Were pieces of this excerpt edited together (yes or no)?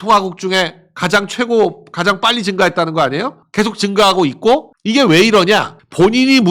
no